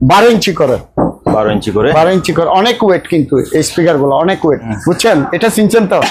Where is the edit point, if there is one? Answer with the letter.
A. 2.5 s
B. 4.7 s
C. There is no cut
B